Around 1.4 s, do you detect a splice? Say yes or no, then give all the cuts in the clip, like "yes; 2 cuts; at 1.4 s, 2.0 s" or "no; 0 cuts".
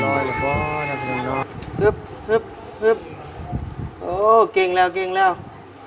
yes; 1 cut; at 1.4 s